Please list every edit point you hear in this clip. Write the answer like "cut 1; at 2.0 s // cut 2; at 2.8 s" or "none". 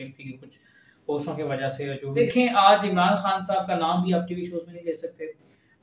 cut 1; at 2.2 s